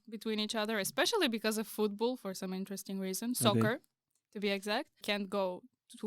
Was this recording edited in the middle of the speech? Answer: yes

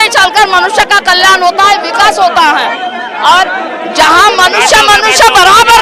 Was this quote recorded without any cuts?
yes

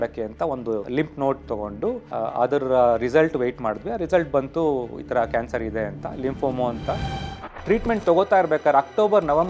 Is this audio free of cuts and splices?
no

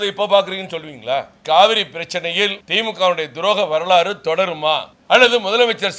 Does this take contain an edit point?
yes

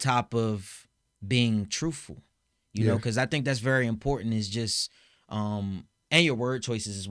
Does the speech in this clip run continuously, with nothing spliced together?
yes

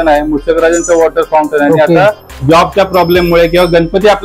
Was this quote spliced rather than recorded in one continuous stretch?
yes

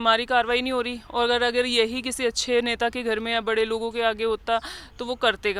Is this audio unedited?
yes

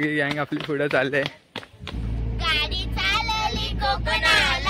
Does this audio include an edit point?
yes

